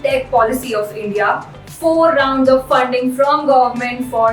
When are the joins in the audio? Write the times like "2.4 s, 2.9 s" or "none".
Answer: 1.6 s